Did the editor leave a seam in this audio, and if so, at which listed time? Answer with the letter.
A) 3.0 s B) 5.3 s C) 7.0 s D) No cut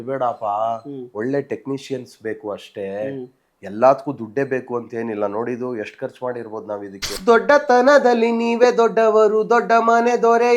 C